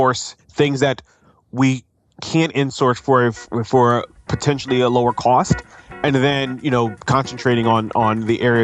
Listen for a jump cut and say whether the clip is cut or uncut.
uncut